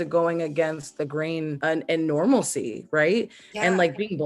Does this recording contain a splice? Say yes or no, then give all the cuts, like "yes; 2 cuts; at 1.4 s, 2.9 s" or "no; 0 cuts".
yes; 1 cut; at 1.6 s